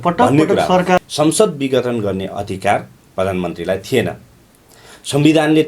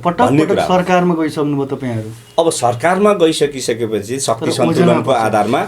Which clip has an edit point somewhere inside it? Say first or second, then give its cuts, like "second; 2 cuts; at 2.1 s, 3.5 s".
first; 1 cut; at 1.0 s